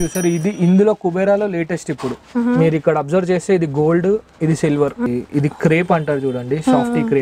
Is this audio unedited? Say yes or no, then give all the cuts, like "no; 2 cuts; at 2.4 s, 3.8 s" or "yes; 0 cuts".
no; 1 cut; at 5.1 s